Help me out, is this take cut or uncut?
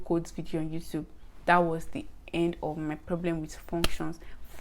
uncut